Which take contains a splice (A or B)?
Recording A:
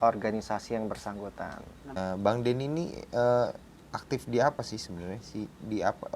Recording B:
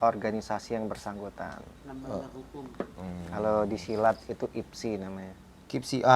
A